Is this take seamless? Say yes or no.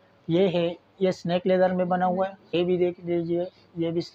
no